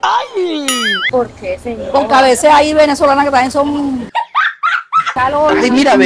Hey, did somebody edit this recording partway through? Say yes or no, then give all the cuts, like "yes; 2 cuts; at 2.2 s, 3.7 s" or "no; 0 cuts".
yes; 1 cut; at 5.1 s